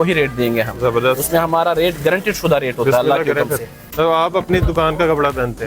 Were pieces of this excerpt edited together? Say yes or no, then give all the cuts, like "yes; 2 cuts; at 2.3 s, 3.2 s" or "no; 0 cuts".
yes; 1 cut; at 3.9 s